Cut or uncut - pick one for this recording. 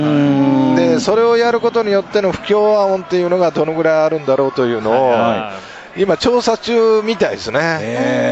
cut